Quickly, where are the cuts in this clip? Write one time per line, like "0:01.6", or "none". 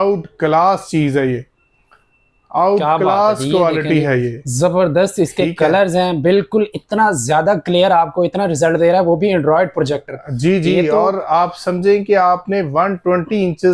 none